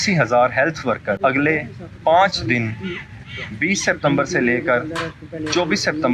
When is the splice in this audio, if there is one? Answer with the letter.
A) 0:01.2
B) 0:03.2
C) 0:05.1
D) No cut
A